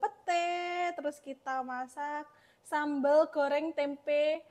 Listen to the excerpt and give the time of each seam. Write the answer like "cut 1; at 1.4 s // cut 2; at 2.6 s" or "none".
none